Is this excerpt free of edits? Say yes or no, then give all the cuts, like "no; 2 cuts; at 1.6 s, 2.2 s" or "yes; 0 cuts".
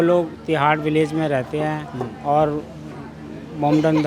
yes; 0 cuts